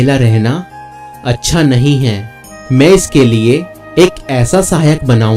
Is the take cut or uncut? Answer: uncut